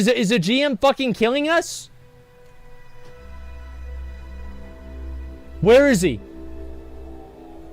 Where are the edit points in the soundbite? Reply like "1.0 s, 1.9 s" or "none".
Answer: none